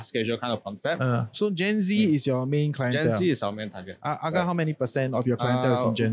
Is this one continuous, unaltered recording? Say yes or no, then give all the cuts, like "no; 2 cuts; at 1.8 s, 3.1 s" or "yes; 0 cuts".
no; 1 cut; at 1.4 s